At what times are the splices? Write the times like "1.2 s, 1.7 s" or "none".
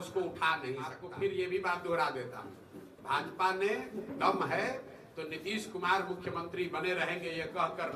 1.0 s